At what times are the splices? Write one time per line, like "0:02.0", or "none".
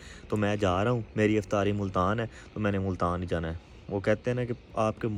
none